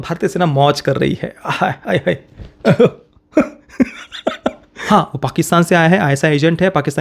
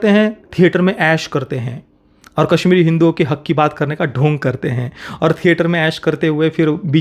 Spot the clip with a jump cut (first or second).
first